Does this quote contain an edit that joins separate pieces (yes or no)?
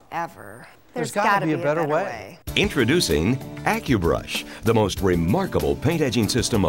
no